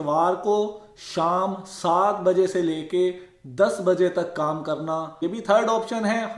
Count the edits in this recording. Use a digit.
1